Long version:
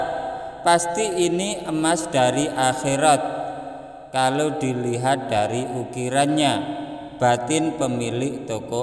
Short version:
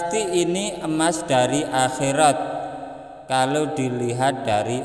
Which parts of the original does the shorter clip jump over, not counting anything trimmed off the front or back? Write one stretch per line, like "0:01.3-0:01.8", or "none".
none